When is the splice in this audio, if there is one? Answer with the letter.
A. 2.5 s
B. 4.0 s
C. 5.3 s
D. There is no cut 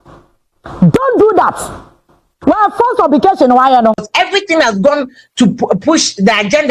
B